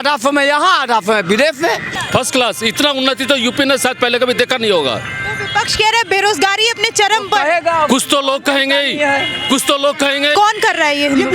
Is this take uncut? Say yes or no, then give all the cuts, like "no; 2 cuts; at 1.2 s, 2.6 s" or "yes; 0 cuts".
no; 2 cuts; at 1.9 s, 10.3 s